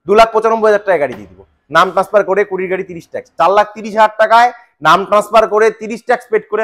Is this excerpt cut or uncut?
cut